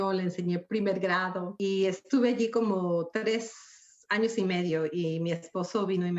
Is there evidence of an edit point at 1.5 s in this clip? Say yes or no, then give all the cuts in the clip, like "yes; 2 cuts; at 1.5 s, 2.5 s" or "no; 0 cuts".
yes; 1 cut; at 1.5 s